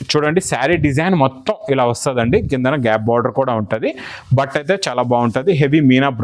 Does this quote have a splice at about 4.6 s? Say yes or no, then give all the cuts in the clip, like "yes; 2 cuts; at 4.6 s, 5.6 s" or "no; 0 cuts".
no; 0 cuts